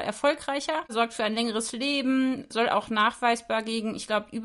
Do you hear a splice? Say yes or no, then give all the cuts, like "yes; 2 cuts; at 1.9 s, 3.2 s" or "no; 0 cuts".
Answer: yes; 2 cuts; at 0.9 s, 2.5 s